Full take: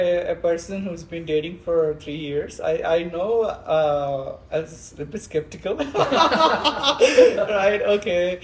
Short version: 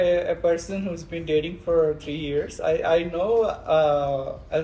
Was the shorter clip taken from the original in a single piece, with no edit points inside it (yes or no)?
yes